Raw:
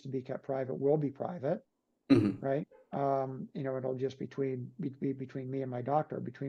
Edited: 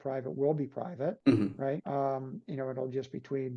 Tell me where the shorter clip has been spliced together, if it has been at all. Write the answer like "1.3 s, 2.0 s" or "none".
1.2 s, 1.8 s